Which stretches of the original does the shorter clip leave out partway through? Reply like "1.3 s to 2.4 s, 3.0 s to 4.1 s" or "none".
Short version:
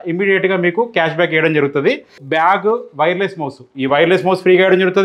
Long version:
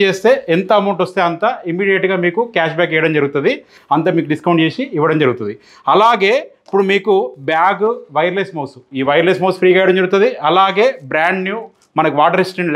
3.8 s to 7.3 s